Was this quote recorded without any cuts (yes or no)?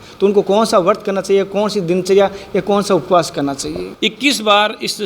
no